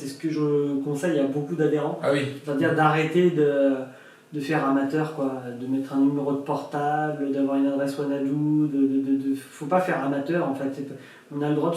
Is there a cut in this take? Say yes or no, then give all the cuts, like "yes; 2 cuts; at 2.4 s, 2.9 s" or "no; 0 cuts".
no; 0 cuts